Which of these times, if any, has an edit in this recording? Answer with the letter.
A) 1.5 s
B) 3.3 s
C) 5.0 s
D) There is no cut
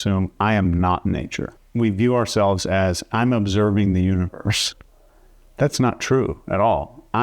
A